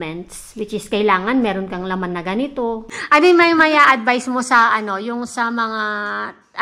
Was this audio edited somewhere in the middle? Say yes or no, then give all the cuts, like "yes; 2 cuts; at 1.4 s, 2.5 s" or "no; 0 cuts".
yes; 1 cut; at 2.9 s